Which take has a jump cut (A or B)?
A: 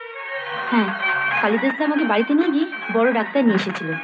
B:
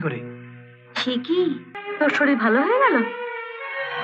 B